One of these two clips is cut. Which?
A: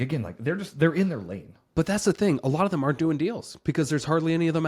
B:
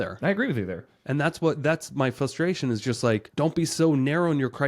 B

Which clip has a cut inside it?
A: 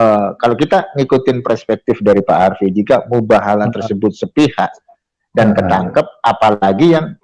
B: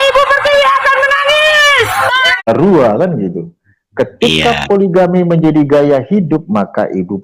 B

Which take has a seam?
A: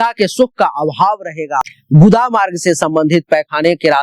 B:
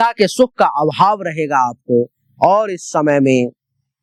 A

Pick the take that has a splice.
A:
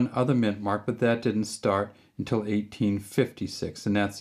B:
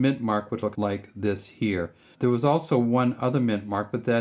B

